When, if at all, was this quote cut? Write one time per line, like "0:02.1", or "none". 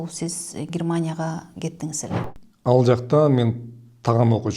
0:02.4